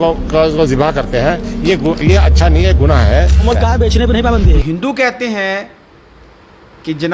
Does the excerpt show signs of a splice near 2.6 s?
no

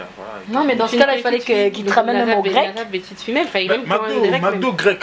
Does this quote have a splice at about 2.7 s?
no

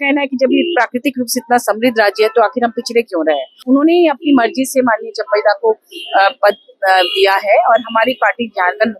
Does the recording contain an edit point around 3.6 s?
yes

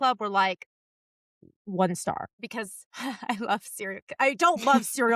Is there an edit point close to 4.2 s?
no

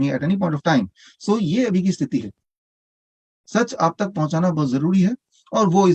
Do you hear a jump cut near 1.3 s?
no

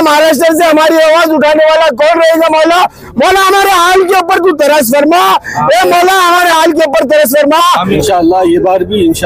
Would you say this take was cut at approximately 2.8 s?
no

